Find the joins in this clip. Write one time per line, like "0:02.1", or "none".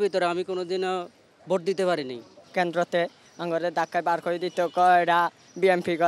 none